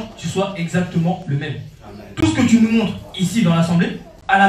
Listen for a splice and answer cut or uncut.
uncut